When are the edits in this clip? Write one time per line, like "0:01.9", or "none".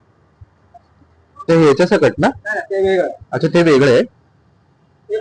0:01.5